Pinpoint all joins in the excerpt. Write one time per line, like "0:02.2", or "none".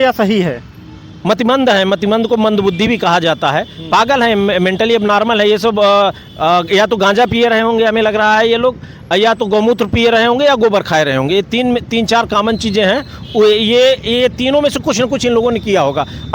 none